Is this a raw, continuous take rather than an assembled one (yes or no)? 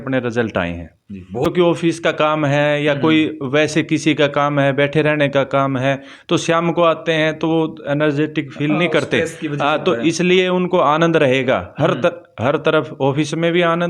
no